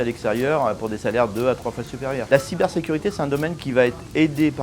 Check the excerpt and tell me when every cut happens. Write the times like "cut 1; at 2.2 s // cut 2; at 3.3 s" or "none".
cut 1; at 2.2 s